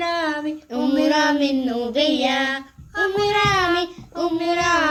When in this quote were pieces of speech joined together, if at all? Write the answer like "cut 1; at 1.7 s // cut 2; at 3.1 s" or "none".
none